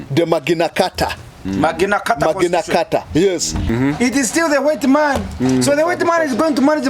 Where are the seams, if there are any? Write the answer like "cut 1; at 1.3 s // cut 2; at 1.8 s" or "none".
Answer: cut 1; at 3.7 s